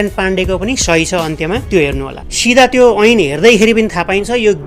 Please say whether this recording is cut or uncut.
cut